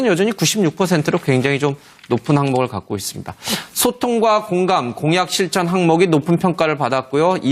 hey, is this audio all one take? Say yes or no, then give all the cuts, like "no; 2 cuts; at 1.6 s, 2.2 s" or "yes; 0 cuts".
no; 1 cut; at 6.6 s